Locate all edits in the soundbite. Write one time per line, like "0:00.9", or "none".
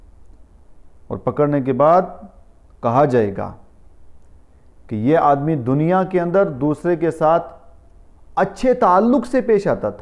none